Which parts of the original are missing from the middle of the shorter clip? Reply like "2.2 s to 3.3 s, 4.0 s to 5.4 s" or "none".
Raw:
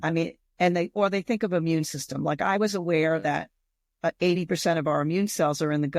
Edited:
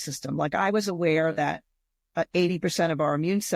none